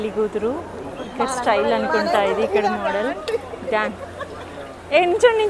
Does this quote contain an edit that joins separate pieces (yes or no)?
no